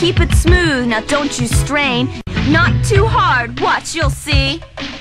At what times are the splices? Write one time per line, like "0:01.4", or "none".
0:02.3